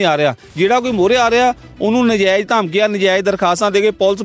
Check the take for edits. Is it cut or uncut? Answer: uncut